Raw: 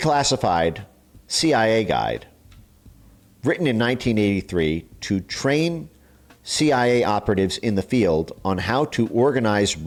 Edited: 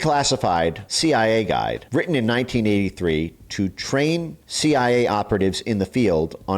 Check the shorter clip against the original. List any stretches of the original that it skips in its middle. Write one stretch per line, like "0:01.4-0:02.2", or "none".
0:00.9-0:01.3
0:02.2-0:03.3
0:05.9-0:06.4